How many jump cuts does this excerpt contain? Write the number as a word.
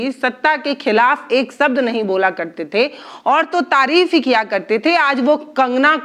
zero